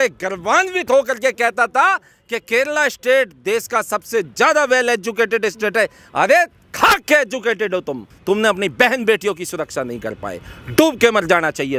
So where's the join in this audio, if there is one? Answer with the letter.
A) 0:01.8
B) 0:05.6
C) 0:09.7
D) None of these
D